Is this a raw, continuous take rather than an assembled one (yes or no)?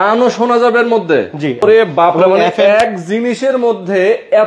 no